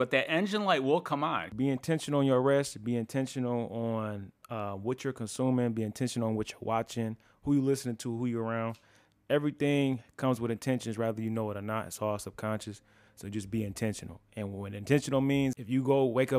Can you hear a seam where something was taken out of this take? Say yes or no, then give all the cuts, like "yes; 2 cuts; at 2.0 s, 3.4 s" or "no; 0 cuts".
yes; 2 cuts; at 1.5 s, 15.5 s